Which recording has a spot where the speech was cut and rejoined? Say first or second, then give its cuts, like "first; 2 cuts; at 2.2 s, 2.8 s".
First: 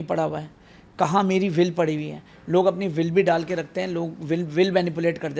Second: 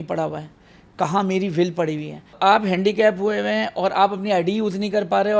second; 1 cut; at 2.4 s